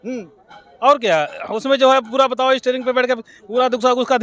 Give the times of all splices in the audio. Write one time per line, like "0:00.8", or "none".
none